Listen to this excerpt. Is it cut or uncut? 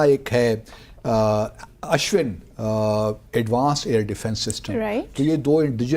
uncut